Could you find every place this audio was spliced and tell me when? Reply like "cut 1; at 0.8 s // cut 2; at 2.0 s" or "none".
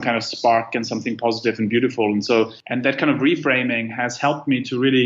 cut 1; at 2.6 s